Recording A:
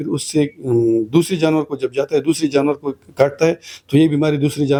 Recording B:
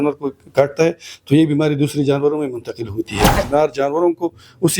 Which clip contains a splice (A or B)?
B